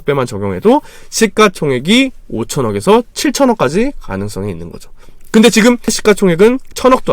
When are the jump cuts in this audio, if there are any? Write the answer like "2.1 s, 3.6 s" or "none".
6.0 s